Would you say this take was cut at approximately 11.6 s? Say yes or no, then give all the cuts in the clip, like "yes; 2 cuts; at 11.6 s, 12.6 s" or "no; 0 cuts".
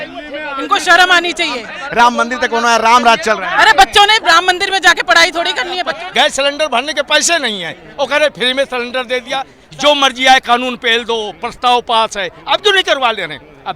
no; 3 cuts; at 1.8 s, 6.0 s, 9.6 s